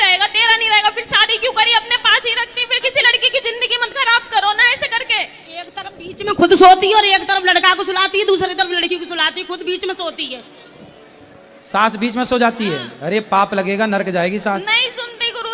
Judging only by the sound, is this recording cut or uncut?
uncut